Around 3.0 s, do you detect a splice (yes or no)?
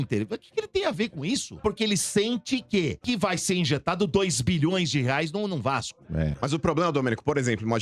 yes